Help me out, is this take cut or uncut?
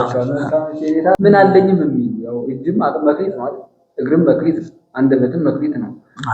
cut